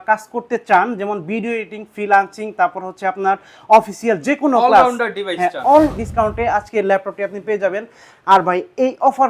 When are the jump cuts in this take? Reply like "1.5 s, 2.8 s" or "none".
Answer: 6.0 s

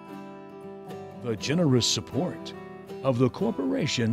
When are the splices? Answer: 1.2 s

